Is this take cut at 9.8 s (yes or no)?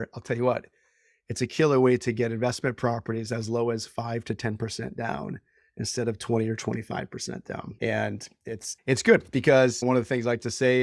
yes